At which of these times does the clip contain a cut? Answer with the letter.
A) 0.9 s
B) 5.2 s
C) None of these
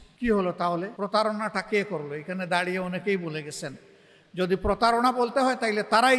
A